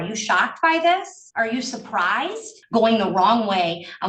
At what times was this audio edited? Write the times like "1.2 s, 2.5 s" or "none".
1.2 s, 2.5 s